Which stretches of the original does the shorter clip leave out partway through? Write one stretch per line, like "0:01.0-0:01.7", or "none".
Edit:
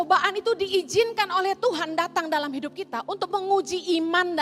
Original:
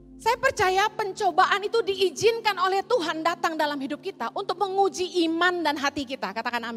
none